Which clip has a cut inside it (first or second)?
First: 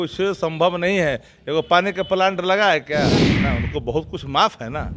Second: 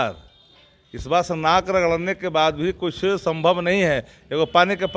first